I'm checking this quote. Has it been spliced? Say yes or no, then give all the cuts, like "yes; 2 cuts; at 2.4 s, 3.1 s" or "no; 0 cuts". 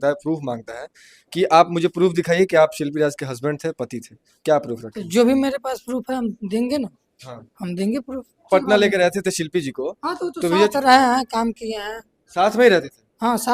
yes; 1 cut; at 8.5 s